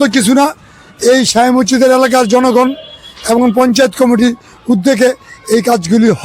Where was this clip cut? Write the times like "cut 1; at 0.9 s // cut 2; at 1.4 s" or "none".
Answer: none